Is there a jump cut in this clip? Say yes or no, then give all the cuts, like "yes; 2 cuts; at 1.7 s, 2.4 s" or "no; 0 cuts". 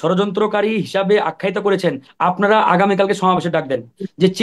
yes; 1 cut; at 2.1 s